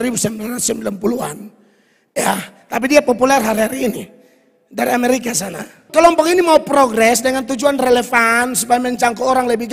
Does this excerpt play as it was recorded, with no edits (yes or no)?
no